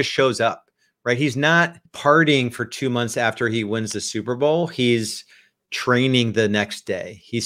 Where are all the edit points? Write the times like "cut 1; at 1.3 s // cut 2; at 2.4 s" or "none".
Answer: cut 1; at 1.8 s